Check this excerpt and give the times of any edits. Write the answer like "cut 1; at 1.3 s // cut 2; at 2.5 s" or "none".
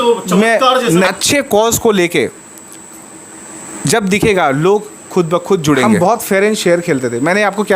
cut 1; at 1.1 s // cut 2; at 5.9 s